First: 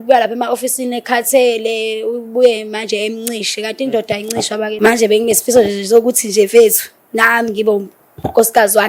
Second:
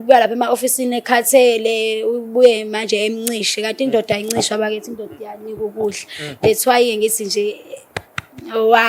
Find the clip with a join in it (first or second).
first